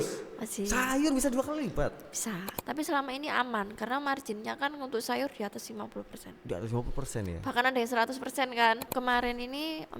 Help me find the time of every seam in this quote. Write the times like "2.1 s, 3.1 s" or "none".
2.5 s, 8.9 s

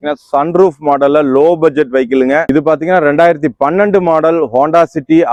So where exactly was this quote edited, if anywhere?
none

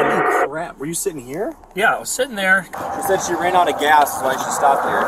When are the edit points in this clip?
2.7 s

